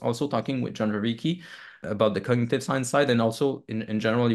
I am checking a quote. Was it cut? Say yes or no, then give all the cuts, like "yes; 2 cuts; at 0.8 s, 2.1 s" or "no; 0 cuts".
yes; 1 cut; at 1.8 s